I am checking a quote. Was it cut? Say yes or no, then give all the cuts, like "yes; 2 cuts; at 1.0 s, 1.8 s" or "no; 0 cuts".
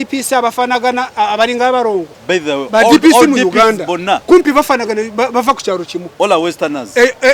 yes; 3 cuts; at 2.1 s, 4.2 s, 6.0 s